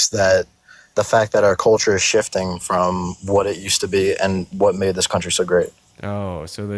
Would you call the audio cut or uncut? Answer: uncut